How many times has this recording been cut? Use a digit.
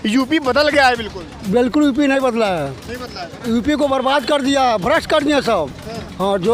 0